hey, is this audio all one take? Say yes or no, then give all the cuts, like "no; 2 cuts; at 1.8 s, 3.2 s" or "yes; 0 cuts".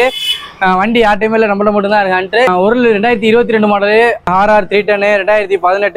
no; 2 cuts; at 2.5 s, 4.3 s